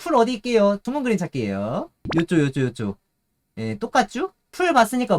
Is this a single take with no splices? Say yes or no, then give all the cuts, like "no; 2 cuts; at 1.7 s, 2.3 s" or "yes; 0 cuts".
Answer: no; 2 cuts; at 0.8 s, 2.1 s